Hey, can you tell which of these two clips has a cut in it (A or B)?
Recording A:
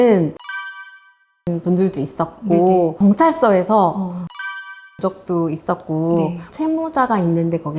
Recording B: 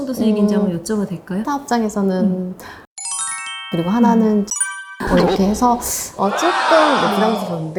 A